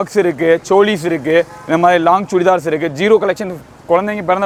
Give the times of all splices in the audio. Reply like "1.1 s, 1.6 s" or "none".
none